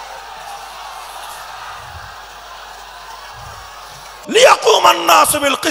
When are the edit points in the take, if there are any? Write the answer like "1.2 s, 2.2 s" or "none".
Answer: 4.1 s

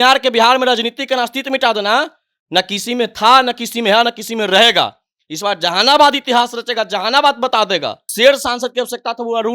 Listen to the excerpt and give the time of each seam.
8.1 s

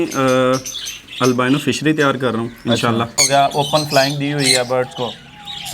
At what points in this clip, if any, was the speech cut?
3.2 s

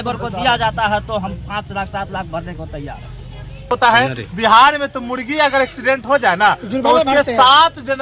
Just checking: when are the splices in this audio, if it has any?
3.7 s

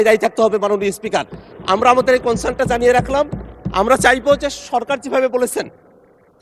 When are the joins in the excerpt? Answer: none

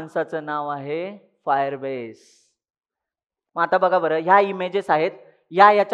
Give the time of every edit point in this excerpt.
3.4 s

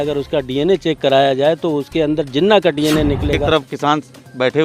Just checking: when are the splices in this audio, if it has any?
3.4 s

